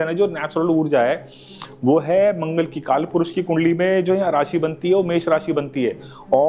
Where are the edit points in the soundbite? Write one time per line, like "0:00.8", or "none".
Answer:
none

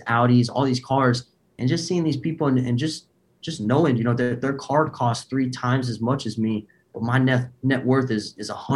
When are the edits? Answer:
none

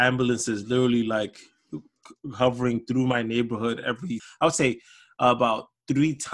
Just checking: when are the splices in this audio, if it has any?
0:04.2

